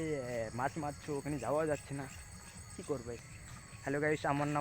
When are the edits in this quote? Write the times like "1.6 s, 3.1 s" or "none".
3.2 s